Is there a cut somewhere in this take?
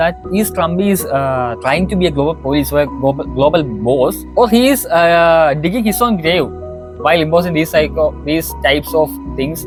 no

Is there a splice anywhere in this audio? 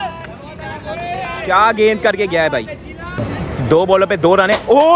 yes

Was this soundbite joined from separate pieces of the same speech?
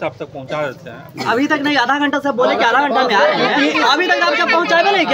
no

